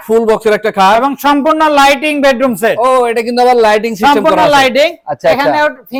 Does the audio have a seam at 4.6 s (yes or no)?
no